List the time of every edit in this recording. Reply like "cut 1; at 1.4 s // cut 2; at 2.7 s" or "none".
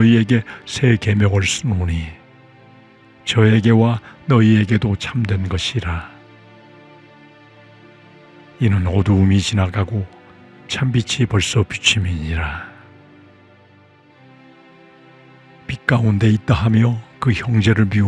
cut 1; at 12.7 s // cut 2; at 14.9 s